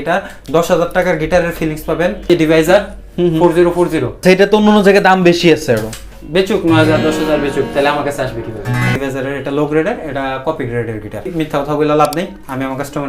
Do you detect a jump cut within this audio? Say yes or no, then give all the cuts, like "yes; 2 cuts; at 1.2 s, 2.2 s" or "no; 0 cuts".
yes; 4 cuts; at 2.3 s, 4.1 s, 9.0 s, 11.3 s